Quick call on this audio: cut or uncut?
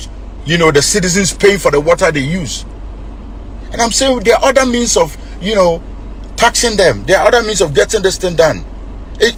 uncut